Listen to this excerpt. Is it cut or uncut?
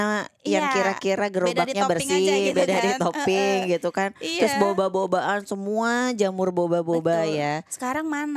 uncut